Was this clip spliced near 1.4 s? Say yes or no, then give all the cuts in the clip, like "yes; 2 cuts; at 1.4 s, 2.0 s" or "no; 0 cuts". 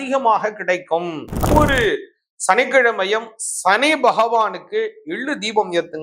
yes; 1 cut; at 1.4 s